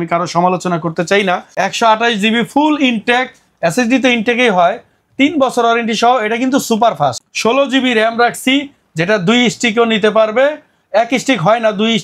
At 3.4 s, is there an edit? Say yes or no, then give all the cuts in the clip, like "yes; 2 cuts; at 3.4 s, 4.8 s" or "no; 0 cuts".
no; 2 cuts; at 1.5 s, 7.2 s